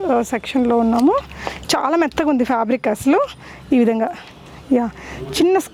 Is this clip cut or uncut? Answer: uncut